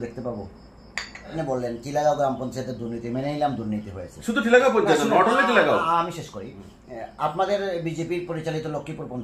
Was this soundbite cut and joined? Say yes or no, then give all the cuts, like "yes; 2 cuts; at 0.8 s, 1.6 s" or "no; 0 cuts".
yes; 1 cut; at 1.3 s